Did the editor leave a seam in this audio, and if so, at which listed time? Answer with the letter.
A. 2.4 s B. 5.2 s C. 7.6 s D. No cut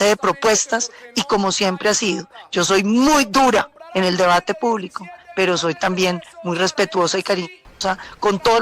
C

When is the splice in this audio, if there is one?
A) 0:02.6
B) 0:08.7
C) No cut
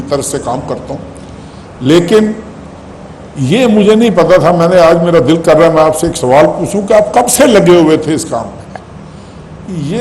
C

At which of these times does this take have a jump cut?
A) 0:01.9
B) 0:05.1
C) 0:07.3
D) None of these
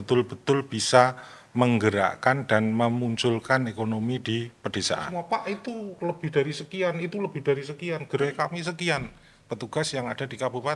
B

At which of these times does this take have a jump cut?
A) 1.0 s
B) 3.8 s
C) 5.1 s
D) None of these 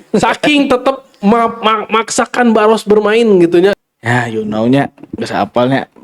B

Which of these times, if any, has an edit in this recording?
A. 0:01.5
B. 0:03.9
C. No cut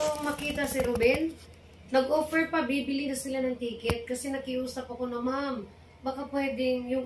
C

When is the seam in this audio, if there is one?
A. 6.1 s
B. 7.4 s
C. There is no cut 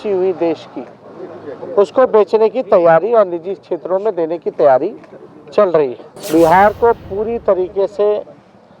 A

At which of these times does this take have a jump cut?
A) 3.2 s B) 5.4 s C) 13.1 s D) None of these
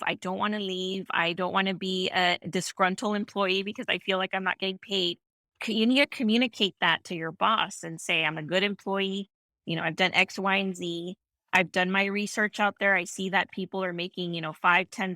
D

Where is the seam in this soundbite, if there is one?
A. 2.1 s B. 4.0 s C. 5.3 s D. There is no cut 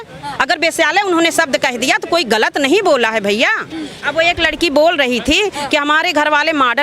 B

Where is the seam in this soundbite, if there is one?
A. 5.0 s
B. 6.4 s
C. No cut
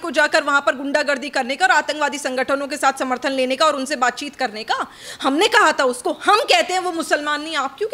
C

